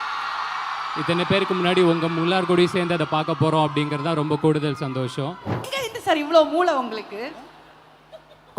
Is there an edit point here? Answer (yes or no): yes